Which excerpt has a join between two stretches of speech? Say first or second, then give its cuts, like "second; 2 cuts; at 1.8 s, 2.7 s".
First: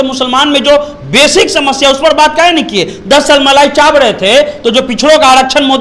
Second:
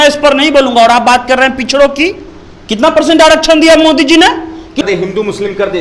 second; 1 cut; at 4.8 s